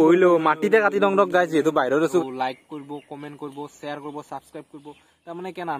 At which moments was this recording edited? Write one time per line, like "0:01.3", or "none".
0:02.2